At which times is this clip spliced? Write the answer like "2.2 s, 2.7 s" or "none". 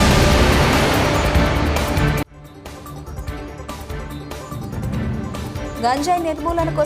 5.2 s